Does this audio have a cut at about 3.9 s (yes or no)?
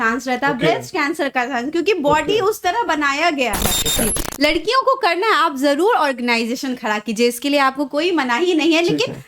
yes